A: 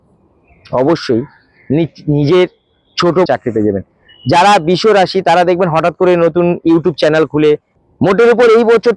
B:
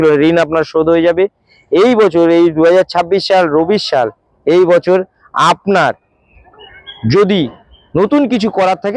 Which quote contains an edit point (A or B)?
A